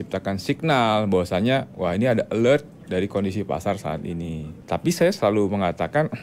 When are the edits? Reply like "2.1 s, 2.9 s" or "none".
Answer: 4.5 s